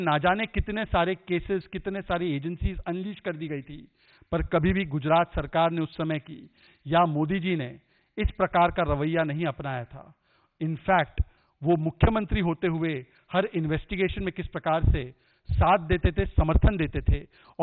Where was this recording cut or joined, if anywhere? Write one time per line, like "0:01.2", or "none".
none